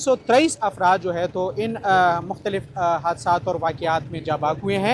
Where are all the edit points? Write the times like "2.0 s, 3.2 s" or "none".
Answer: none